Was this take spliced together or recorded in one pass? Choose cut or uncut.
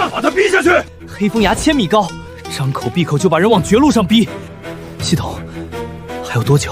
cut